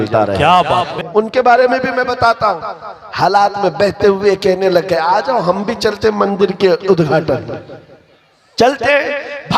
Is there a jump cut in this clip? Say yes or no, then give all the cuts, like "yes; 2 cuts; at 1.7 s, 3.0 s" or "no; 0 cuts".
yes; 1 cut; at 0.9 s